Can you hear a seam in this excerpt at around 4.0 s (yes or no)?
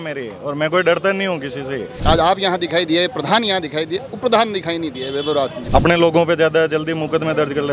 no